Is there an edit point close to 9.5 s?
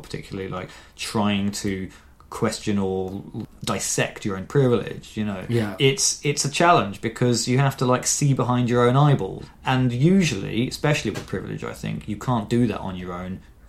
yes; 2 cuts; at 5.7 s, 9.5 s

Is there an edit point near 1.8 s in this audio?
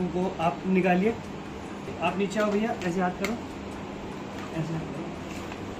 yes; 1 cut; at 1.8 s

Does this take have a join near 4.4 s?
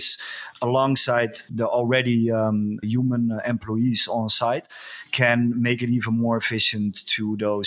no; 2 cuts; at 1.5 s, 2.8 s

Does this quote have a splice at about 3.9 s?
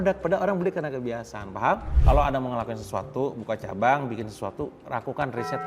no; 1 cut; at 1.9 s

